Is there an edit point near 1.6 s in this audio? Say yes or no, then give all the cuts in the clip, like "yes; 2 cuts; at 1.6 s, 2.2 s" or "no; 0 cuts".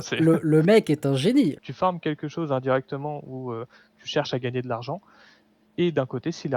yes; 1 cut; at 1.6 s